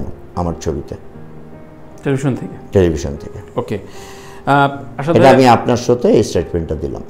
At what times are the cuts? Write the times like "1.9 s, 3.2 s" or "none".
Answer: none